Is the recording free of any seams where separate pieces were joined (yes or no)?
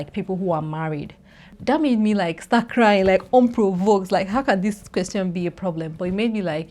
no